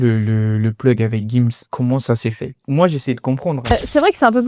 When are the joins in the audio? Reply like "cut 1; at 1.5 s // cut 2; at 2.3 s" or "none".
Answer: cut 1; at 1.6 s // cut 2; at 2.5 s // cut 3; at 3.7 s